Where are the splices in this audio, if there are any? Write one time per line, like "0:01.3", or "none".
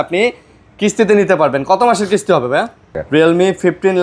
0:03.0